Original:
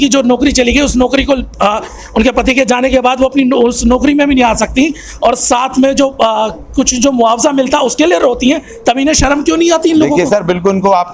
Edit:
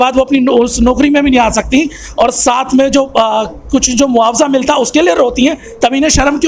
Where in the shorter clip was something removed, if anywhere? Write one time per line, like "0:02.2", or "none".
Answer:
none

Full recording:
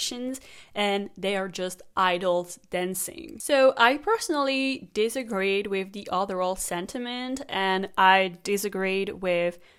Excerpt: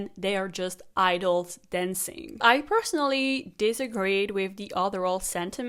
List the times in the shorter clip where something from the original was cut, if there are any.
0:02.4

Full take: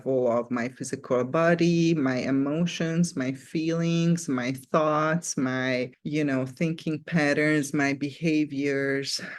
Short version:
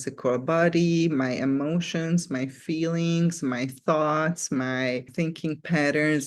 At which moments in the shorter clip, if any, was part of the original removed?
0:05.1

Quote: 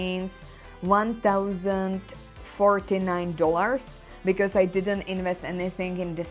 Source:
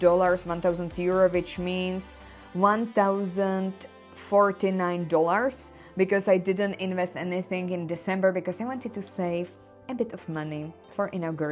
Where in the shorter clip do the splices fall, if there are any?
none

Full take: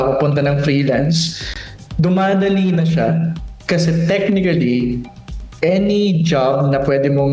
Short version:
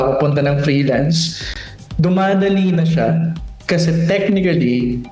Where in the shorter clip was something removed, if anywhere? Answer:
none

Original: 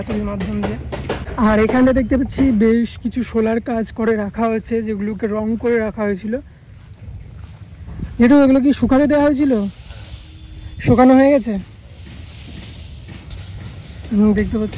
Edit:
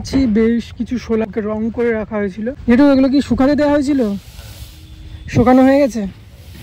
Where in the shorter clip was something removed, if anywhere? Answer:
0:01.3
0:02.6

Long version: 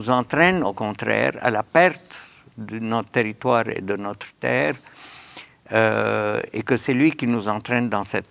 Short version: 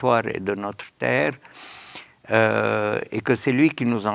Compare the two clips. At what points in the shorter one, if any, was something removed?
none

